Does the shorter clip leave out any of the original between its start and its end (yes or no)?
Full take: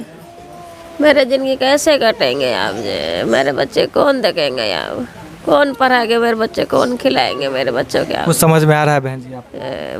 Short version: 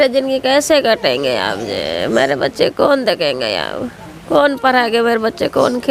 no